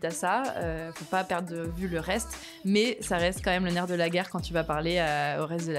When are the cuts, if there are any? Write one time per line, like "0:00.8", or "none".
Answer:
none